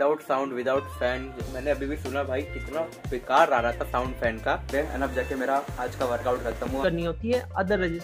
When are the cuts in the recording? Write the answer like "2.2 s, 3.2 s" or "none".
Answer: 4.7 s, 6.8 s